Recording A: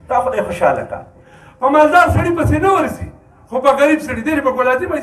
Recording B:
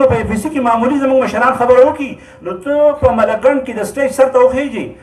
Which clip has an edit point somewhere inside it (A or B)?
A